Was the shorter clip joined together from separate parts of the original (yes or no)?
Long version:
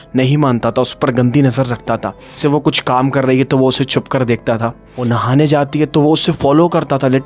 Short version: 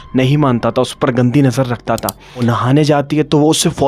yes